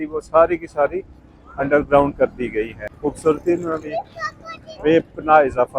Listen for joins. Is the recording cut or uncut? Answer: cut